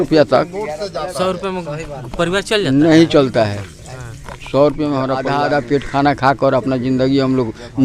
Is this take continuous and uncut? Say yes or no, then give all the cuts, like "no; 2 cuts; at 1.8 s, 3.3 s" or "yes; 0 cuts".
no; 1 cut; at 5.3 s